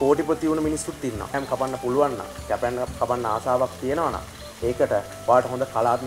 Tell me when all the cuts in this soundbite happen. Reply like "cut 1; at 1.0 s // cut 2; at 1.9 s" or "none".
cut 1; at 1.4 s